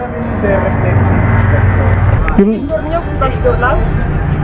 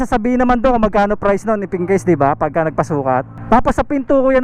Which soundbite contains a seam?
first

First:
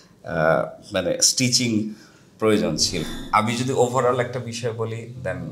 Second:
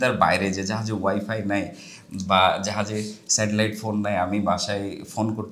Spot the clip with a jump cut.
first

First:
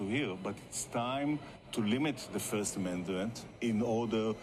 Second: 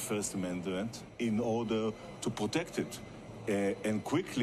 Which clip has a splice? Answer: second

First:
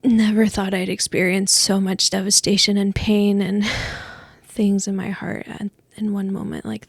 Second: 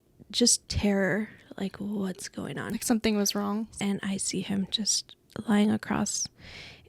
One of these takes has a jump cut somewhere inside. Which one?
second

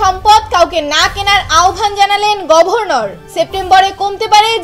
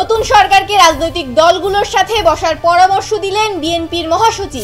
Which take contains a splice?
first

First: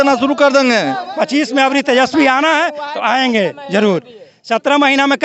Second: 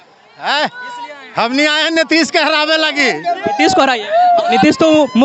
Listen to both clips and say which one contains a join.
first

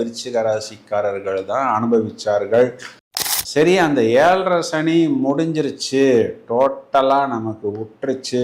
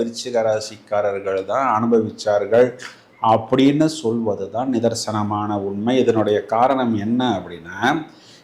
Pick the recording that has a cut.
first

